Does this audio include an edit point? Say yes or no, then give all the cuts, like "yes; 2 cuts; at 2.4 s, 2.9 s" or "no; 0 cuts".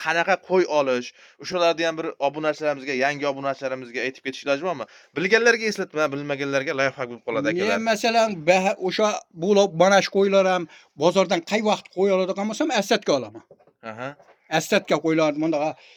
no; 0 cuts